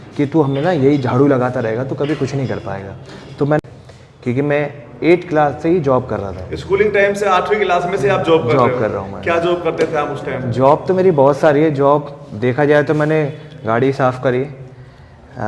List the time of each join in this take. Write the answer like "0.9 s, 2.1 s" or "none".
3.6 s

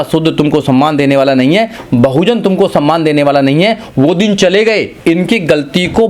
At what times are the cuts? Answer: 4.9 s

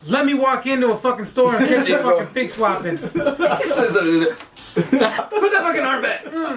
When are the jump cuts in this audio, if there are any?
5.2 s

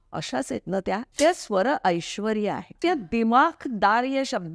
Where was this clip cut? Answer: 1.1 s, 2.7 s

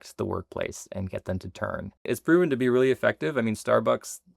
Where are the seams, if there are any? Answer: 2.1 s

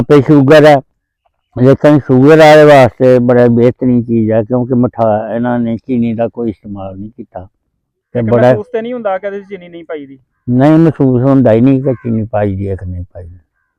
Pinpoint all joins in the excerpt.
none

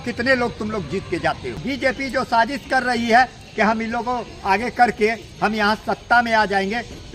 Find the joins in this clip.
1.6 s

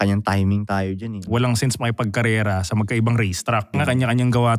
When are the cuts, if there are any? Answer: 1.2 s, 3.7 s

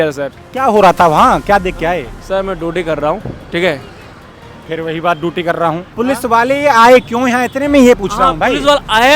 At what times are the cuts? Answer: 2.1 s, 5.9 s

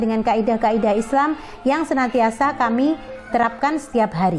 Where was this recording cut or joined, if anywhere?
3.3 s

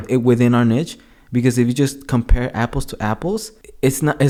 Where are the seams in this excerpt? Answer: none

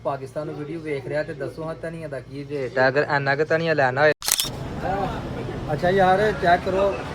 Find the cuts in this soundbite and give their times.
4.2 s

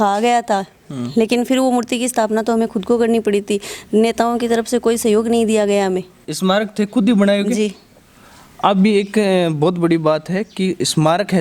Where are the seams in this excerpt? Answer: none

